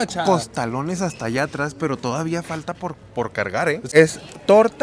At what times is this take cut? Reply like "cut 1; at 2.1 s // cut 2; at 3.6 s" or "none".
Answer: cut 1; at 3.9 s